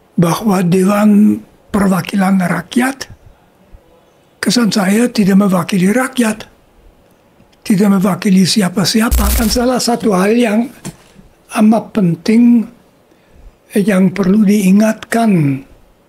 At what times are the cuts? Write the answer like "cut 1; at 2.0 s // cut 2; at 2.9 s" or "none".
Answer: cut 1; at 9.2 s

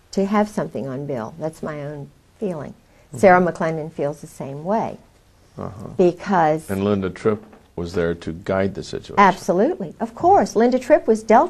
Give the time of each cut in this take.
none

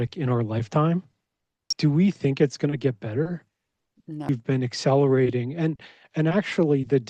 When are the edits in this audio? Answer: cut 1; at 1.7 s // cut 2; at 4.3 s

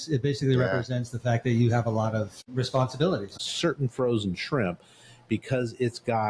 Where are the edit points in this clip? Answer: cut 1; at 2.4 s // cut 2; at 3.4 s

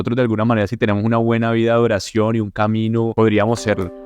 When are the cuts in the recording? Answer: cut 1; at 3.1 s

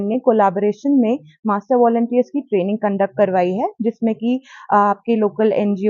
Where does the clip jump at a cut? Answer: none

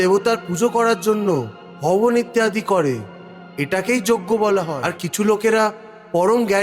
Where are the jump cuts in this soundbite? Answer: cut 1; at 4.7 s

